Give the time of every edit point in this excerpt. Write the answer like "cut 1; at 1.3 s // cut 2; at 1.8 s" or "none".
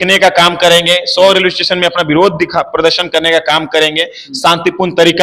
none